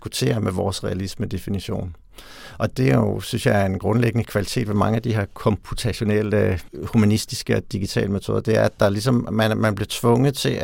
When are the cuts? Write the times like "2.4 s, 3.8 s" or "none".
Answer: 2.7 s, 6.7 s